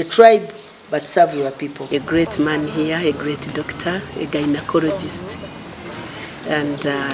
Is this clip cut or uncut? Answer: cut